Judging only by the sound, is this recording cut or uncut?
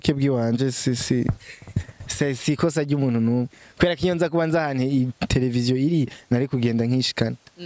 uncut